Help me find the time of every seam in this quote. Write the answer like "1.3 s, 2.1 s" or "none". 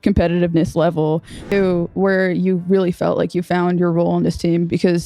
1.3 s

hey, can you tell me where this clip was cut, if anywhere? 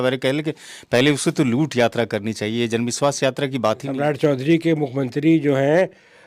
3.9 s

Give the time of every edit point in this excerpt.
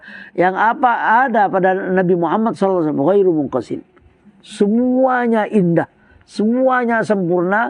none

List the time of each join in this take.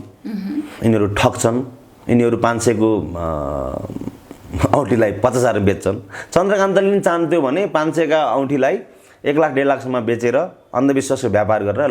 none

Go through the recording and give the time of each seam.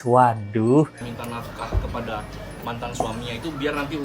1.1 s

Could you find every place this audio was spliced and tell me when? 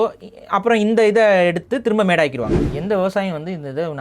2.7 s

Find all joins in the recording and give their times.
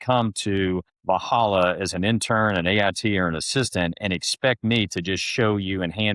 0.9 s

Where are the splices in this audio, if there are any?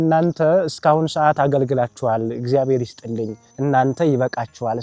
3.4 s

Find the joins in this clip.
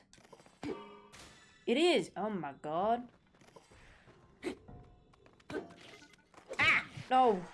none

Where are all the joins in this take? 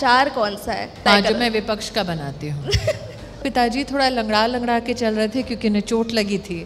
1.0 s, 3.3 s

